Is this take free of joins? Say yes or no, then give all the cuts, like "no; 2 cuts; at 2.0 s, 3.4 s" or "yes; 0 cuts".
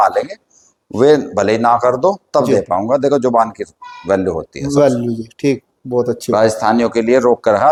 yes; 0 cuts